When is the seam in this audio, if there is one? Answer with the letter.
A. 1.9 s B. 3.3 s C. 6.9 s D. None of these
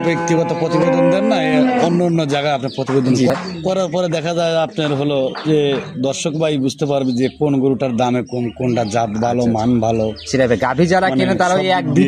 B